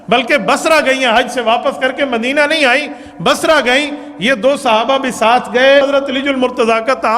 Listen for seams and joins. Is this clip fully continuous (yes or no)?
no